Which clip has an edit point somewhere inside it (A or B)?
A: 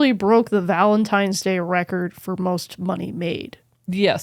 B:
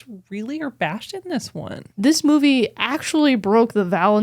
B